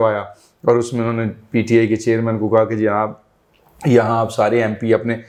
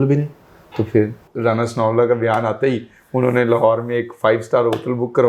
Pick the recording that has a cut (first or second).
second